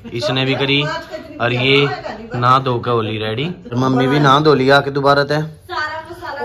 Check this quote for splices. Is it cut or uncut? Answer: cut